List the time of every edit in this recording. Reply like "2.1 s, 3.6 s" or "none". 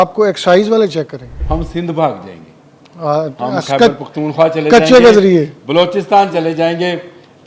1.3 s